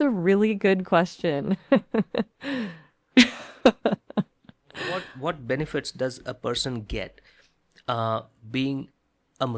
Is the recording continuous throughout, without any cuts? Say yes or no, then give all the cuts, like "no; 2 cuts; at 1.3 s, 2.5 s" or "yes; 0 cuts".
no; 1 cut; at 5.1 s